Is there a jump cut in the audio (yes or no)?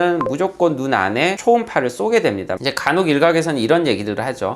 yes